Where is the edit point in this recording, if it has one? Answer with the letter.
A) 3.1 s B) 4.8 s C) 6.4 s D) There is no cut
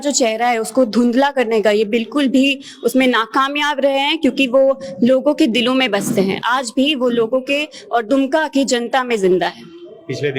D